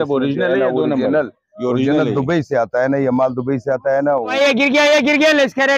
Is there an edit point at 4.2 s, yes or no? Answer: yes